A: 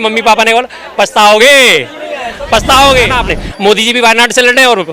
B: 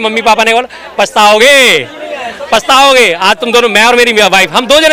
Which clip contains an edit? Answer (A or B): A